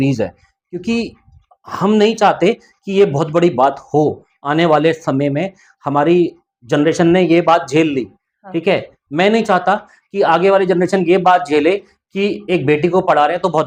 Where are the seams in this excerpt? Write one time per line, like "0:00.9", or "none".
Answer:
none